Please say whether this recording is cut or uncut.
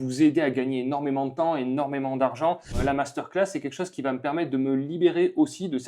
cut